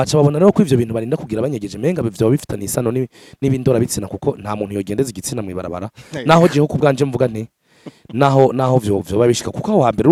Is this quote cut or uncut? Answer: uncut